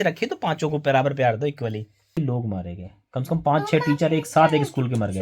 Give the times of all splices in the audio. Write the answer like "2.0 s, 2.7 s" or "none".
2.2 s